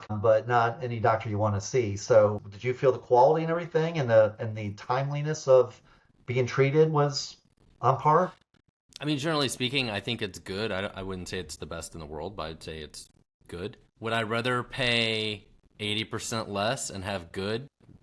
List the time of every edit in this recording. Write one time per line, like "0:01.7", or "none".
0:13.8